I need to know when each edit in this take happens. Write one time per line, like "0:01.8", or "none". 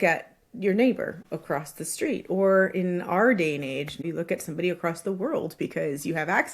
0:01.2
0:04.0